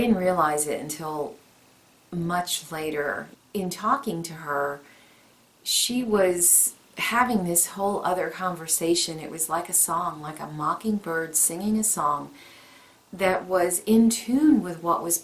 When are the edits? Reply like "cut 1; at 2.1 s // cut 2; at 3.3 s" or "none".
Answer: cut 1; at 3.4 s